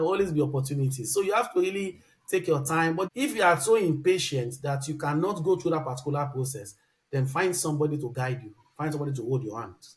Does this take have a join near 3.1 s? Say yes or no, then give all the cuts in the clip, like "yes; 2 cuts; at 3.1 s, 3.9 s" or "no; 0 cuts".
yes; 1 cut; at 3.1 s